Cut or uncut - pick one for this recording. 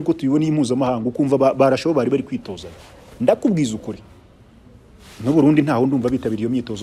uncut